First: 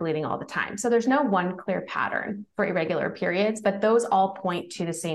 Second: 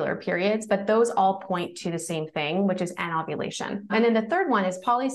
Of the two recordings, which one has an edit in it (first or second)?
second